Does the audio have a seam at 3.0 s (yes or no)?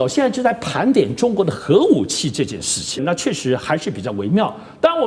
yes